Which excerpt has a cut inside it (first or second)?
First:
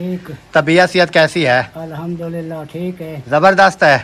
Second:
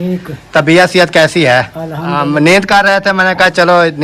second